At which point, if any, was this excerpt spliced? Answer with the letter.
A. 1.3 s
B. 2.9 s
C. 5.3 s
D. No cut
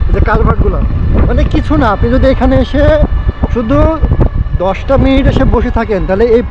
D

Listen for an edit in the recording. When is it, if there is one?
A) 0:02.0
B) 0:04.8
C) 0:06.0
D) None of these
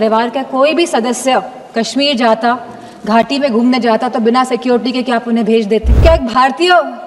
C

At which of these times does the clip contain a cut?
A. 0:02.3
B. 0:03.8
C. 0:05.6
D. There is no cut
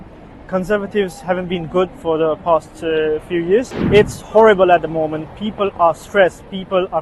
B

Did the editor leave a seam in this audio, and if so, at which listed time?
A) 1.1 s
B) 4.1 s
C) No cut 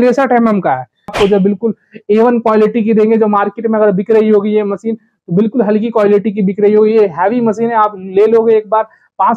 A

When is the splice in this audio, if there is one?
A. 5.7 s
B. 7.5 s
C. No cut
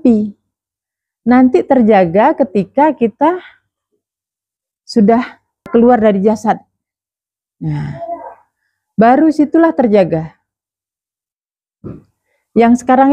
A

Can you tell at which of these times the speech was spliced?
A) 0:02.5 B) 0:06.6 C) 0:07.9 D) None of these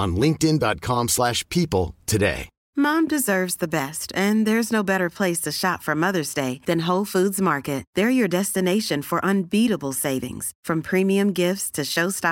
A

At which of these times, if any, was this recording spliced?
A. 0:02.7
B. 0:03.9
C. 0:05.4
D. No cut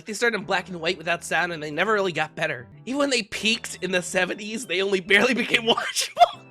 A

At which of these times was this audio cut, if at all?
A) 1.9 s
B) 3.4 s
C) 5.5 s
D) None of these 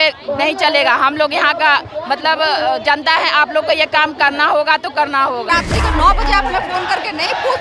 C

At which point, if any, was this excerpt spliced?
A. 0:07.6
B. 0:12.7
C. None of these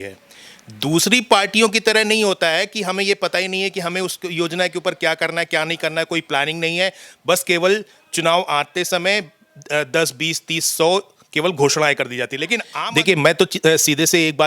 B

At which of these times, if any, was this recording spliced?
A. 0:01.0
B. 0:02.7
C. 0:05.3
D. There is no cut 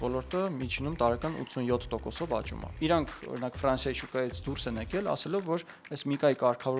B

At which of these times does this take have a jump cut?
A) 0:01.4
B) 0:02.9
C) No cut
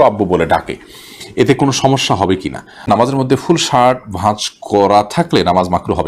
B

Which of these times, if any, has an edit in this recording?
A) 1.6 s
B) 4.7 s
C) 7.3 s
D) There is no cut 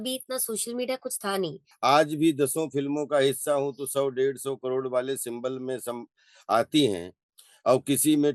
A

